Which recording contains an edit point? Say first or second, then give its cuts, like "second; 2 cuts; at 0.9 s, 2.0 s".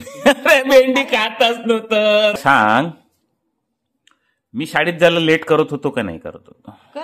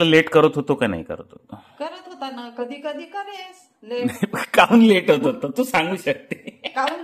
first; 1 cut; at 2.4 s